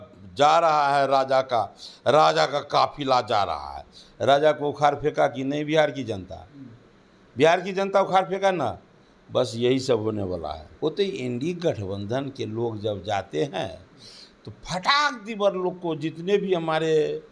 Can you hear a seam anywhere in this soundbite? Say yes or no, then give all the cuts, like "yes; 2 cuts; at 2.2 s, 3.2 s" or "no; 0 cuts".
yes; 1 cut; at 10.6 s